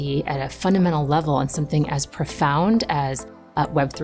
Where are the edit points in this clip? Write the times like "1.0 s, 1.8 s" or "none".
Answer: none